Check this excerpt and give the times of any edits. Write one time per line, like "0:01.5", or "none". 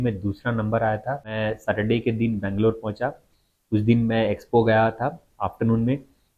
0:01.3